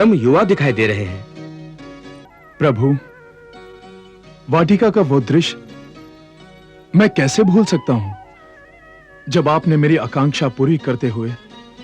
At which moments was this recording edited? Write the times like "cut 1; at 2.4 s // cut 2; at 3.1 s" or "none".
cut 1; at 2.2 s